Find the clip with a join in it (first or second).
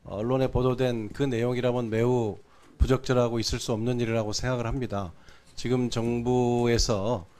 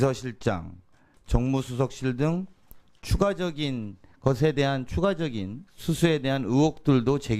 second